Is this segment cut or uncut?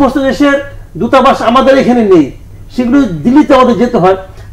uncut